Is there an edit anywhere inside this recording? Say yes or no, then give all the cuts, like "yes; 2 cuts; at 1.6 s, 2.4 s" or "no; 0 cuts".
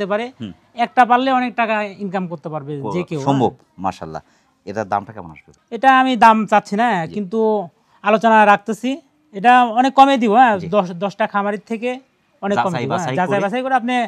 no; 0 cuts